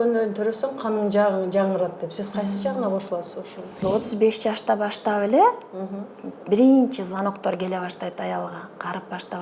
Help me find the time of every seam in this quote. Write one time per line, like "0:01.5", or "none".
0:03.8